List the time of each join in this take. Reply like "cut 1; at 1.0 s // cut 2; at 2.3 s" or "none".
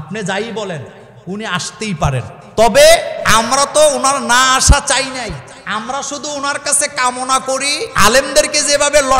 cut 1; at 2.4 s // cut 2; at 3.2 s // cut 3; at 5.5 s // cut 4; at 7.8 s